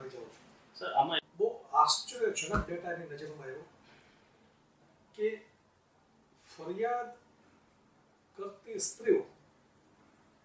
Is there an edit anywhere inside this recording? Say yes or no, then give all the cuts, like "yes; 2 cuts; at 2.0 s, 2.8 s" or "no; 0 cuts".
yes; 1 cut; at 1.2 s